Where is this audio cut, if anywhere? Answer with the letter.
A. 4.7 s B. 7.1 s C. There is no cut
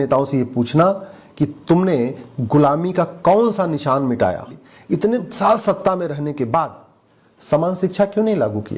A